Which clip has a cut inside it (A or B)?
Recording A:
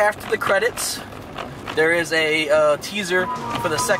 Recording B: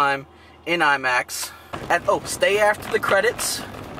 B